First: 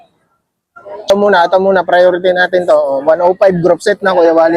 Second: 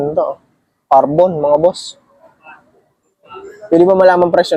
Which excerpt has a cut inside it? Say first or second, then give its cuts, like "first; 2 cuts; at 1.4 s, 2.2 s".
first; 1 cut; at 1.1 s